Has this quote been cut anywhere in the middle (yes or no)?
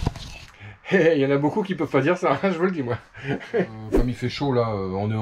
yes